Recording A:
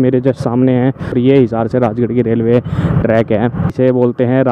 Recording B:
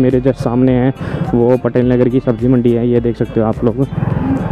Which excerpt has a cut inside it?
A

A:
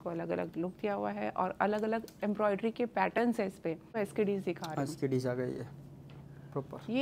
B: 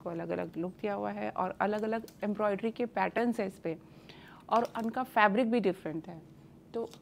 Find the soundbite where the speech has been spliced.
A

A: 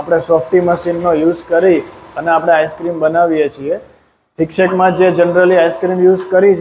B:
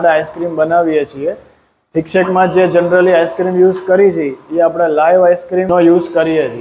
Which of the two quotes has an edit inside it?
B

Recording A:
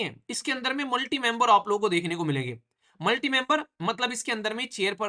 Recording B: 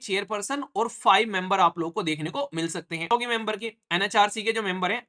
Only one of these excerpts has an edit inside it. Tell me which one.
B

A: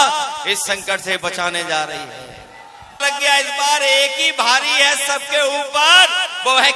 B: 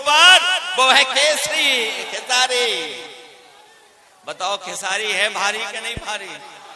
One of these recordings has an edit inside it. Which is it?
A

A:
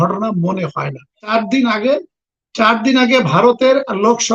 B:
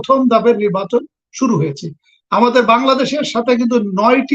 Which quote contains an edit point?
A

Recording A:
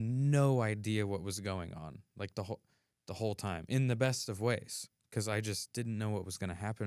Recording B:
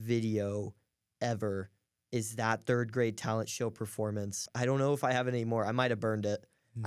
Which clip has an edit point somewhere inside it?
B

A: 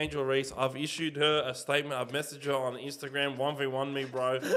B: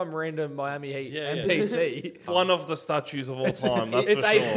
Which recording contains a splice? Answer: B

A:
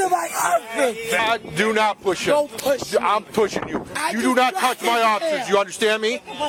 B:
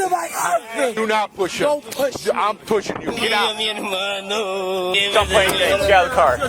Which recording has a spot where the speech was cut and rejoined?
B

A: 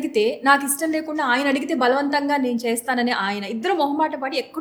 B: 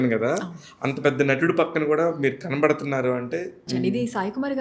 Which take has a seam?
B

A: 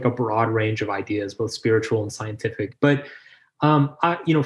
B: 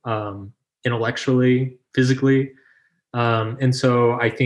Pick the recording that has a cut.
A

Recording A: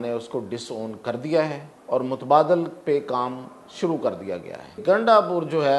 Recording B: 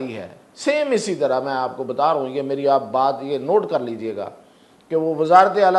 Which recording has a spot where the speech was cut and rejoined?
A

